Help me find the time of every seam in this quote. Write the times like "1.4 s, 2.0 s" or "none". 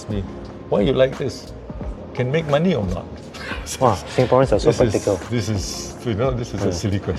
none